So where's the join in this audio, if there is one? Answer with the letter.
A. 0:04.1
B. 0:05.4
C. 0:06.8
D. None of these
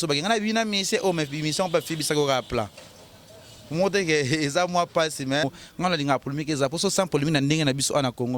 B